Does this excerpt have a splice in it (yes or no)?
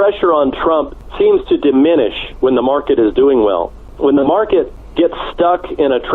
yes